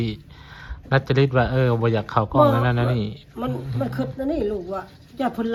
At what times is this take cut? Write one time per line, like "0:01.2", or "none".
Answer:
none